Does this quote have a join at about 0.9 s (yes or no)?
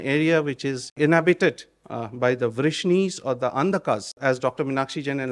yes